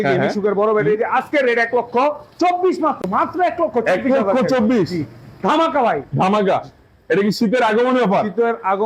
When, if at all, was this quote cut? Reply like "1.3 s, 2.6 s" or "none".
none